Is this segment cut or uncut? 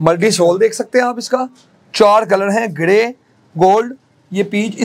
uncut